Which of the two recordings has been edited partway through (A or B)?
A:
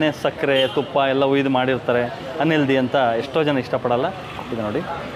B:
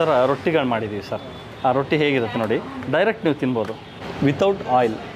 B